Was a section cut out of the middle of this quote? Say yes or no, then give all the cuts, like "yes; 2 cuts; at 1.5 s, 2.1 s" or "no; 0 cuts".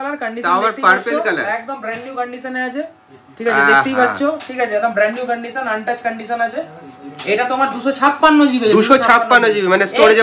no; 0 cuts